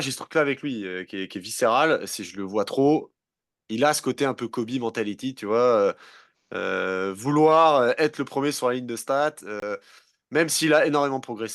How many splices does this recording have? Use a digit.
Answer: 0